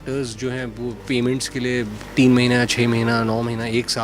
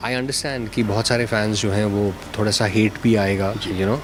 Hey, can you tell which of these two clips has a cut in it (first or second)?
first